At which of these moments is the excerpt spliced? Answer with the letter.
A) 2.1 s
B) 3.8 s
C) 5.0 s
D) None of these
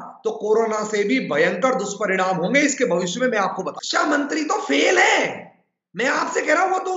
B